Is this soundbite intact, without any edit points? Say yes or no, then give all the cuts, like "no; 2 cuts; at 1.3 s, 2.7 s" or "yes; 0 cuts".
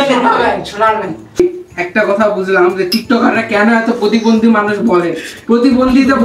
no; 1 cut; at 1.3 s